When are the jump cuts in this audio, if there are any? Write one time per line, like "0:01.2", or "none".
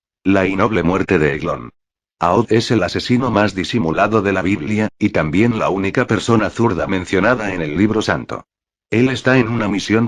0:06.5

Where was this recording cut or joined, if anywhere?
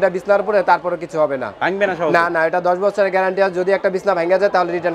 none

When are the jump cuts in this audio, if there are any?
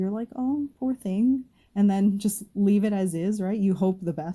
none

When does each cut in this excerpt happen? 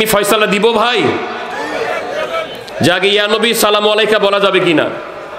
none

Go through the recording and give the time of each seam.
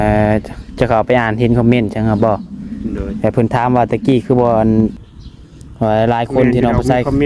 0:05.0

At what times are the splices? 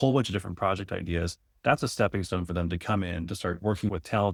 none

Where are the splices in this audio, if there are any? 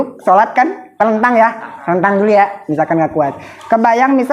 0:00.9

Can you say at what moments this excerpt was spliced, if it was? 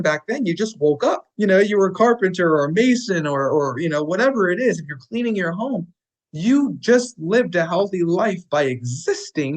0:01.3

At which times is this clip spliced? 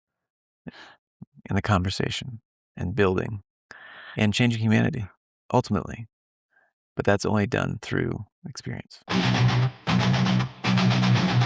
0:08.9

